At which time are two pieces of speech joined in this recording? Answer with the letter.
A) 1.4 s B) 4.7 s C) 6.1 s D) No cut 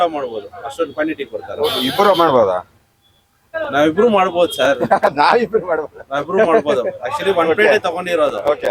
D